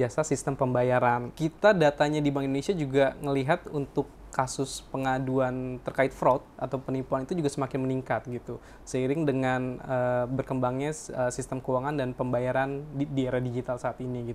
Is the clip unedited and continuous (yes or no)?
no